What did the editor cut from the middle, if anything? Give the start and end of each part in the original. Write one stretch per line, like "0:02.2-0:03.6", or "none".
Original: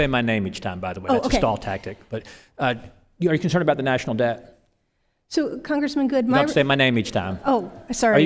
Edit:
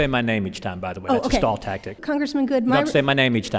0:02.0-0:05.6